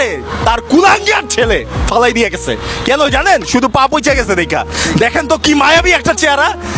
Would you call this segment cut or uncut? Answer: uncut